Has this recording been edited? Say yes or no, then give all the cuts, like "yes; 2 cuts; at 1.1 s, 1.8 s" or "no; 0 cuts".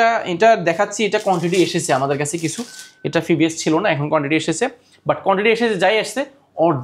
no; 0 cuts